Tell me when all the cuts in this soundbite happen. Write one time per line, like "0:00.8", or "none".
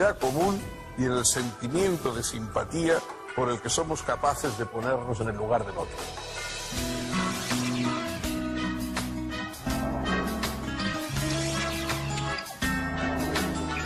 none